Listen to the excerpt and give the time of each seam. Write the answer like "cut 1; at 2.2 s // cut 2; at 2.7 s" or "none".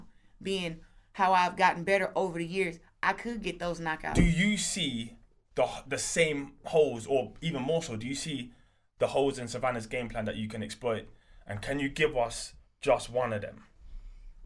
cut 1; at 4.1 s